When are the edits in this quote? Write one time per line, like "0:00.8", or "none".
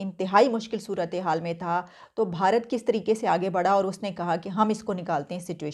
none